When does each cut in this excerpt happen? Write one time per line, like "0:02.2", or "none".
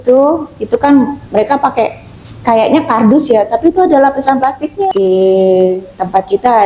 0:04.7